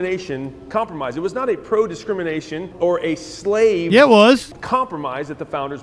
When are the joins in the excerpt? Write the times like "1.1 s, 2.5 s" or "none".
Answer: 2.7 s, 4.5 s